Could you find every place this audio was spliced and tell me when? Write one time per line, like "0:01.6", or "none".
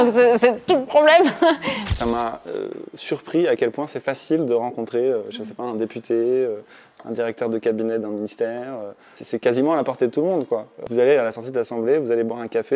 0:01.6
0:09.1
0:10.8